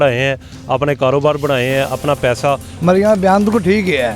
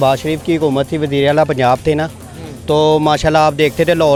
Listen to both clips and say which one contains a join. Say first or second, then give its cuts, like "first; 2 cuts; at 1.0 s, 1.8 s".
first; 1 cut; at 2.7 s